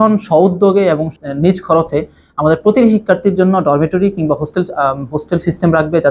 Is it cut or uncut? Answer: uncut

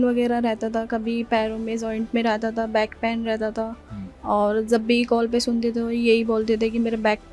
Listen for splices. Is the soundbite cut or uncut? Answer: uncut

